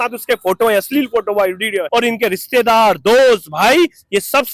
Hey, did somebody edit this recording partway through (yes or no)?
yes